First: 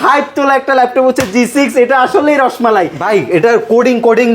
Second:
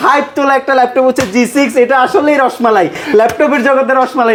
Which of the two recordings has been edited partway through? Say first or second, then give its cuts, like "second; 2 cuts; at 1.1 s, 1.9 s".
first; 1 cut; at 3.0 s